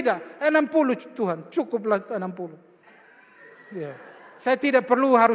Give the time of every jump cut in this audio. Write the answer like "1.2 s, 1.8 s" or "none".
none